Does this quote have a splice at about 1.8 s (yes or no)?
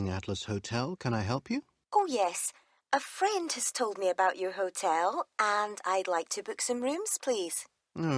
yes